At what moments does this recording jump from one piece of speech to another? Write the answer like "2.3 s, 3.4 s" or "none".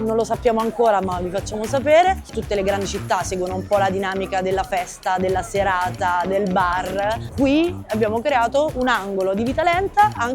2.3 s, 7.3 s